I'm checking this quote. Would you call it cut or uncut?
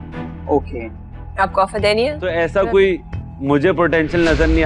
cut